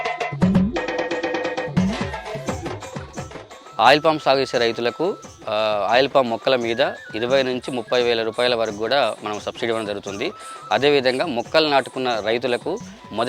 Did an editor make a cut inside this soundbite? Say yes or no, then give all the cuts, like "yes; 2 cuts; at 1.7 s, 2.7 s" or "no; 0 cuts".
yes; 1 cut; at 1.6 s